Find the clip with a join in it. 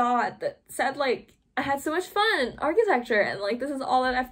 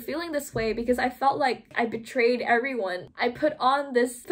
second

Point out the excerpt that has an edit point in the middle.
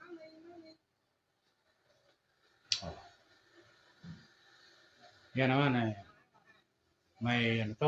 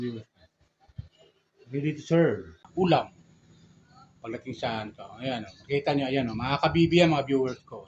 second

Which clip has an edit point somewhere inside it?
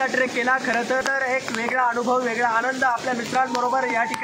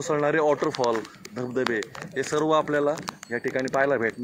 first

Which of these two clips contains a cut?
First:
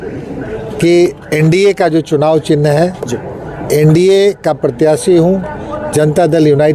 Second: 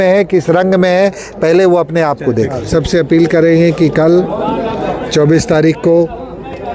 second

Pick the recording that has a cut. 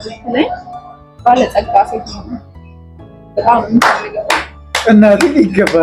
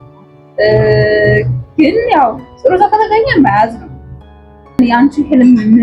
second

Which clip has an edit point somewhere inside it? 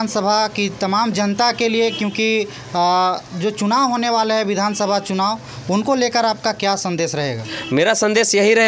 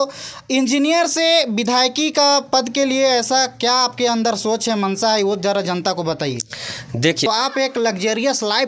second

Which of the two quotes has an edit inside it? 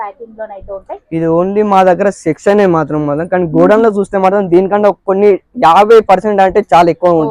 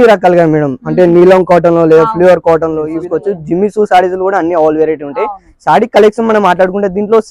second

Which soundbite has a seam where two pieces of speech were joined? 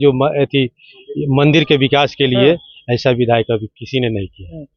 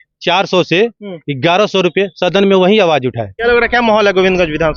second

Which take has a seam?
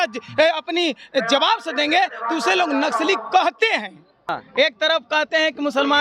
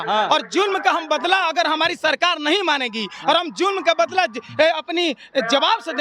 first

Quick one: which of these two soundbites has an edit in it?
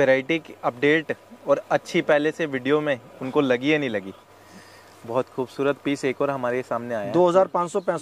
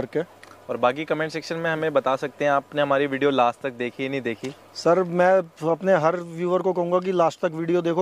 first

